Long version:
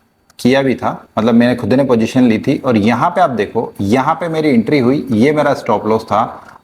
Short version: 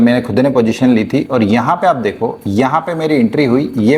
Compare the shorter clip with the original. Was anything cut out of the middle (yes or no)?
no